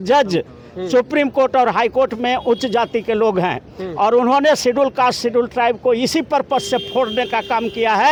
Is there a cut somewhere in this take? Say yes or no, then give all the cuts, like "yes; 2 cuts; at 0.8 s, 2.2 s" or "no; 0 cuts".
no; 0 cuts